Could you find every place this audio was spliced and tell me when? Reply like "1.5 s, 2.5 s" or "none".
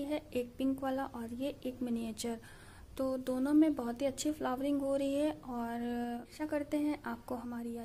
6.3 s